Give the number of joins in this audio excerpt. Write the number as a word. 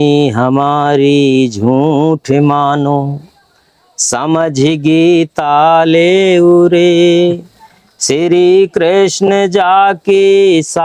zero